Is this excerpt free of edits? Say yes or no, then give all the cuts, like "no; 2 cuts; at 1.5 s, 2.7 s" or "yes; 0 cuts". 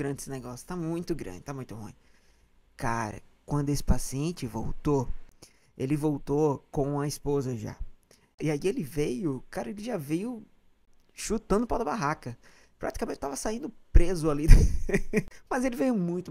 no; 2 cuts; at 8.4 s, 15.4 s